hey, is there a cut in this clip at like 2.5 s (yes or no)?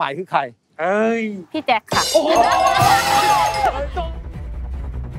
no